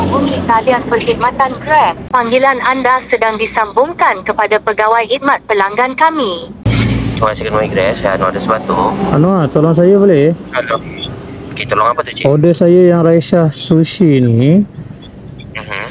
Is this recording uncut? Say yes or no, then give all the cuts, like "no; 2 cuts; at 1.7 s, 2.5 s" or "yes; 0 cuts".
yes; 0 cuts